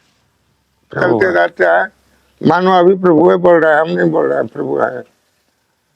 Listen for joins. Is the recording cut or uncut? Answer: cut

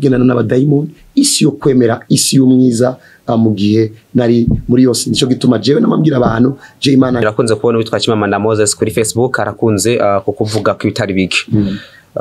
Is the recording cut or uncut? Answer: cut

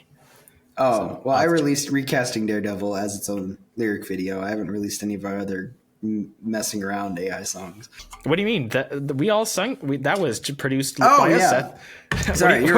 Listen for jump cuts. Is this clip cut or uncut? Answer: cut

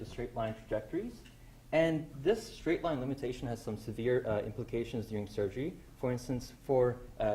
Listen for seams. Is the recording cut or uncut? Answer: cut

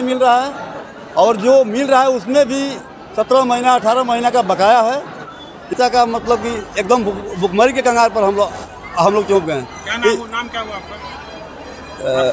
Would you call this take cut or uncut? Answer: cut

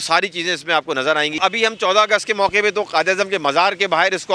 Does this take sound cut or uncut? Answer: cut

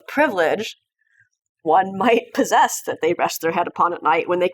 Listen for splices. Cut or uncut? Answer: cut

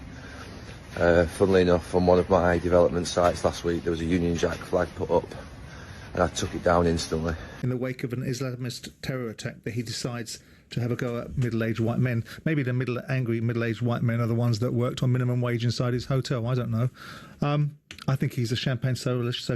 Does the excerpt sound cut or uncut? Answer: cut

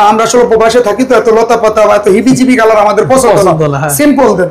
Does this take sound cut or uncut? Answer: uncut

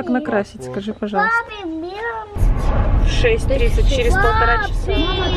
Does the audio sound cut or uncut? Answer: cut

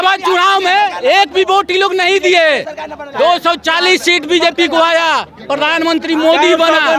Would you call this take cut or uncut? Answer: uncut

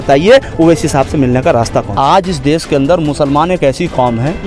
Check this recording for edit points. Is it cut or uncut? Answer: cut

